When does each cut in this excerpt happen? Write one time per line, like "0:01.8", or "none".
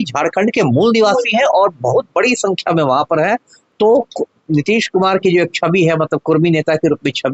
0:03.5